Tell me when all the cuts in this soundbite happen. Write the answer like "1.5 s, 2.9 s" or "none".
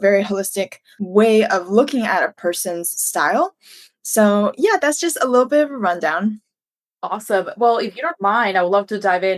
none